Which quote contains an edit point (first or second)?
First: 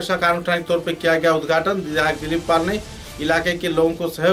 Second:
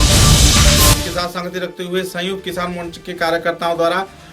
second